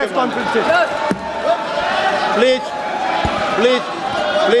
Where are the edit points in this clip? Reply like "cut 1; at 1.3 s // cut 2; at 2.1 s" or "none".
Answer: none